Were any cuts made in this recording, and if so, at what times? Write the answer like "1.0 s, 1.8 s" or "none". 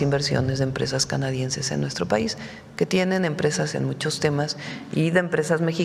none